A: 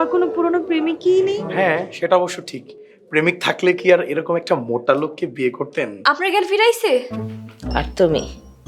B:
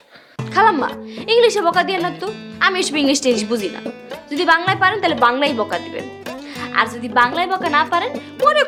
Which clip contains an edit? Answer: A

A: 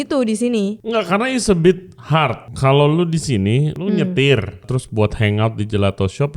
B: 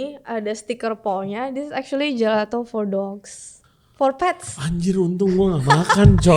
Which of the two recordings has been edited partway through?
A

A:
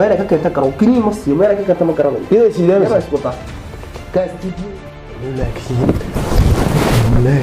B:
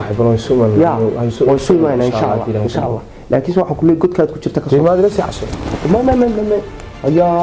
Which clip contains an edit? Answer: A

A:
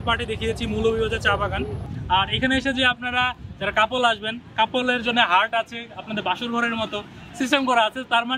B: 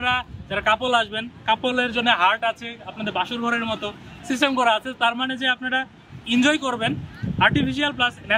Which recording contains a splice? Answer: A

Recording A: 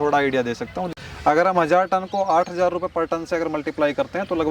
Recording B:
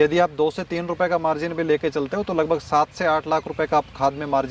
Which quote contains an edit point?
A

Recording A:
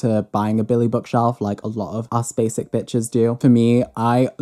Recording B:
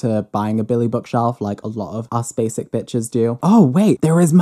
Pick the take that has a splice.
B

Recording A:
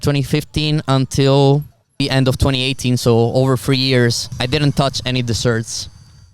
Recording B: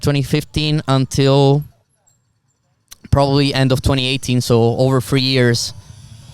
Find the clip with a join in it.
A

